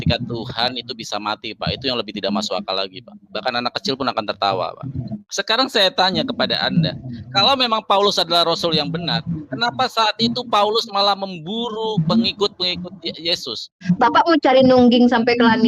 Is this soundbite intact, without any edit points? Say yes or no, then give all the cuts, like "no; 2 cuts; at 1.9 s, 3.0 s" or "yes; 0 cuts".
no; 2 cuts; at 5.2 s, 13.8 s